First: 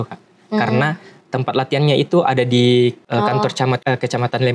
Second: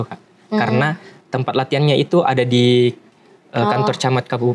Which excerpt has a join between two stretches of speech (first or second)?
first